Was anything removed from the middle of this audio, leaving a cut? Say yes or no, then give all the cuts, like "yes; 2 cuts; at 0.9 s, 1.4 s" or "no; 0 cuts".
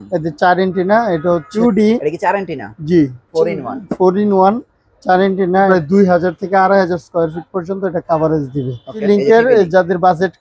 yes; 3 cuts; at 1.5 s, 5.7 s, 9.0 s